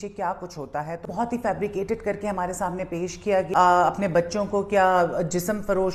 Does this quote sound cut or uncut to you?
cut